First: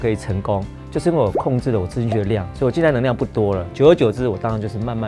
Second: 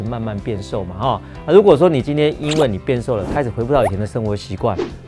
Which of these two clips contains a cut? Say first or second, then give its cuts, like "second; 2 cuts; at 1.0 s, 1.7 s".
first; 1 cut; at 3.6 s